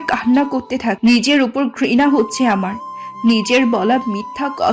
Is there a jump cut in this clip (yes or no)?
yes